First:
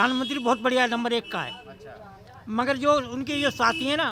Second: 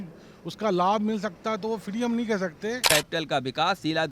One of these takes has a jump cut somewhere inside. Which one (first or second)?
second